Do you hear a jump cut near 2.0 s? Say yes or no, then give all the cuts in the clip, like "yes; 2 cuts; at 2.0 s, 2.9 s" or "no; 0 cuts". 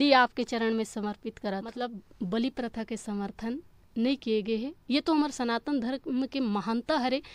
yes; 1 cut; at 2.0 s